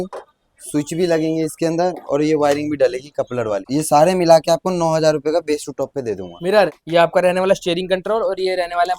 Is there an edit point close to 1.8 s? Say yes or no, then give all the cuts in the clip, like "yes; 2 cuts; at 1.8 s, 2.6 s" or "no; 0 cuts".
no; 2 cuts; at 3.6 s, 6.8 s